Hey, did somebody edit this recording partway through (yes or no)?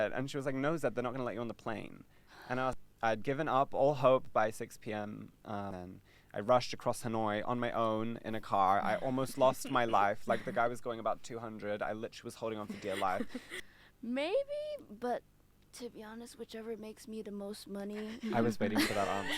yes